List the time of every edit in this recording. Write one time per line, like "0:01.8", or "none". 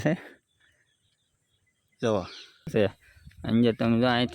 0:02.7